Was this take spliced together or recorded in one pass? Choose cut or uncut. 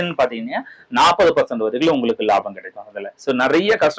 uncut